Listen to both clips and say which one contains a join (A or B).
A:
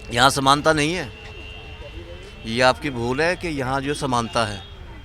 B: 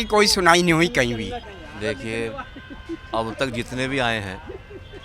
B